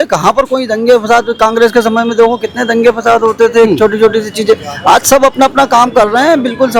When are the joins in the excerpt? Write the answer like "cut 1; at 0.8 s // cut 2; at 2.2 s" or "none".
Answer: none

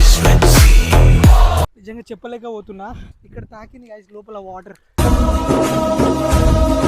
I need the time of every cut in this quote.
cut 1; at 1.7 s // cut 2; at 3.2 s

